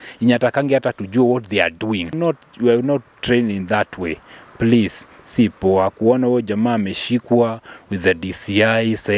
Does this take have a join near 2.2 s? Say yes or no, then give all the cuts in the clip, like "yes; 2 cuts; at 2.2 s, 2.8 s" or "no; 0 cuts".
yes; 1 cut; at 2.2 s